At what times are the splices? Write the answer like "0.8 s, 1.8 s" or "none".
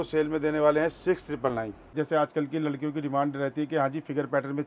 1.9 s